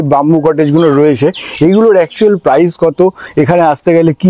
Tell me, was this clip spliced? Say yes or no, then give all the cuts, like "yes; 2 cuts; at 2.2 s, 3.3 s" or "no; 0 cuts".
no; 0 cuts